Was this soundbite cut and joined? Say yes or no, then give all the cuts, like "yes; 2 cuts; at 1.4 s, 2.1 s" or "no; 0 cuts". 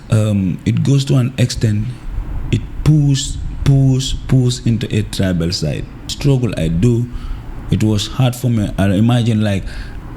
yes; 1 cut; at 6.1 s